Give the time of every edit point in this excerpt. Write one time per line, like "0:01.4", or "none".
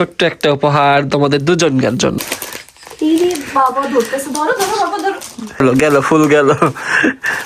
0:02.2
0:05.6